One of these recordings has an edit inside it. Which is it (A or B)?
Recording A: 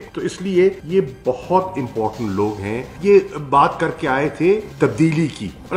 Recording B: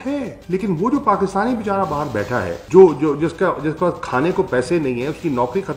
A